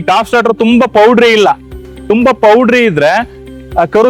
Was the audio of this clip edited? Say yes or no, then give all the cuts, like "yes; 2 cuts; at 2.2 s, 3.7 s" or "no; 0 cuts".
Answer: no; 0 cuts